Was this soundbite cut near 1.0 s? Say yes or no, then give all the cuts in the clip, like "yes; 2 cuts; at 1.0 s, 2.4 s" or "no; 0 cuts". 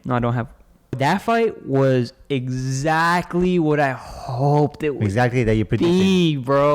yes; 1 cut; at 1.0 s